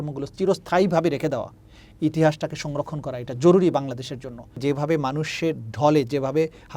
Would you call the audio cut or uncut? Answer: cut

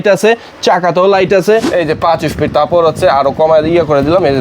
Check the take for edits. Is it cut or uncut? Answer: cut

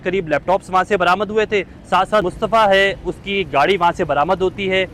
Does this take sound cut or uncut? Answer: cut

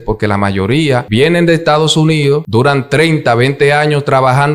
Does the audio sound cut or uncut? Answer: cut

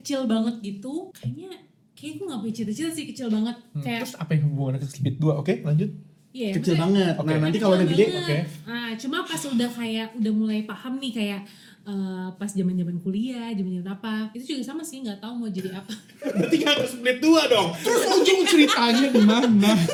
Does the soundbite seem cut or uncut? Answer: uncut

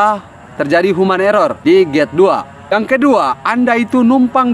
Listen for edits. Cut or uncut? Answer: cut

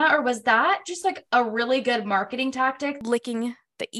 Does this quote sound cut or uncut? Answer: cut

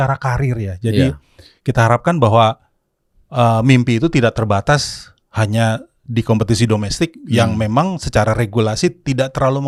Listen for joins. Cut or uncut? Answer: uncut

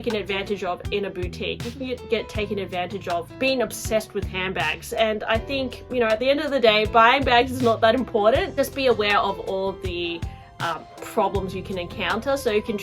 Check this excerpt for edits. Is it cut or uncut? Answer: uncut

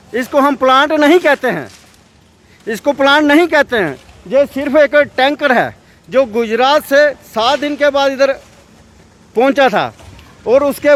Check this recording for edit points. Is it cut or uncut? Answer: uncut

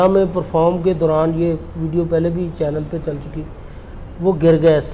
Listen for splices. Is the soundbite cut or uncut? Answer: uncut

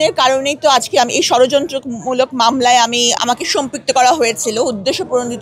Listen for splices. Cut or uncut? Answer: cut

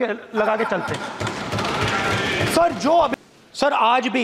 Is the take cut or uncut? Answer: cut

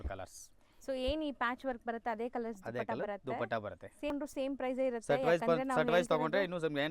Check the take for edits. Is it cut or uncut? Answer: cut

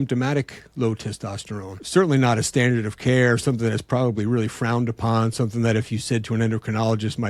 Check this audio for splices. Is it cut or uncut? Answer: cut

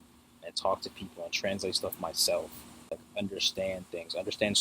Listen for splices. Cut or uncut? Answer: cut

